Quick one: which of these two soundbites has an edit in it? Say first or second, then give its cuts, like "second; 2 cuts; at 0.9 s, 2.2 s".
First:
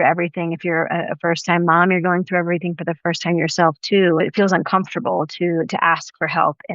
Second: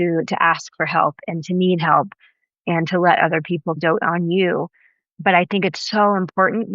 first; 1 cut; at 4.2 s